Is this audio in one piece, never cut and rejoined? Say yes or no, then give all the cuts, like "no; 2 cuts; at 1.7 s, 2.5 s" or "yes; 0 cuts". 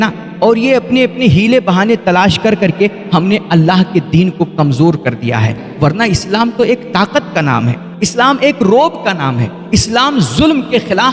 yes; 0 cuts